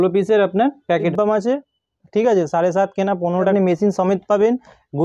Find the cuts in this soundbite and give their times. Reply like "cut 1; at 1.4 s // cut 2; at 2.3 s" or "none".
cut 1; at 1.1 s // cut 2; at 3.5 s